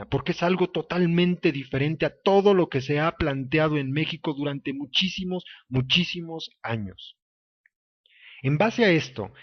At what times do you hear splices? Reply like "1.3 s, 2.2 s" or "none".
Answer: none